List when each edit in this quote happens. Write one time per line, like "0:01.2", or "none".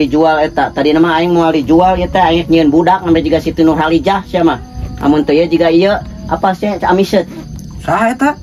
none